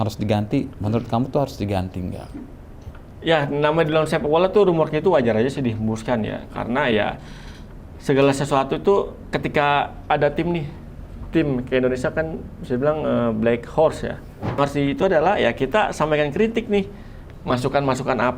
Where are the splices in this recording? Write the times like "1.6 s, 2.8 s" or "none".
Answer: 14.6 s